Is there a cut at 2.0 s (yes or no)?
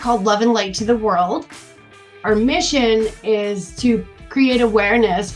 yes